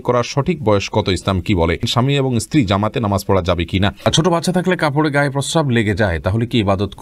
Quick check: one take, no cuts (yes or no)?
no